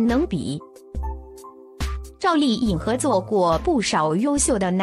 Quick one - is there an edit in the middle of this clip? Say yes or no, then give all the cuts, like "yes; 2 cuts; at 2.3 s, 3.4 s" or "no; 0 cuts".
no; 0 cuts